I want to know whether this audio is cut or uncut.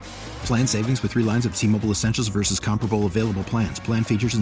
uncut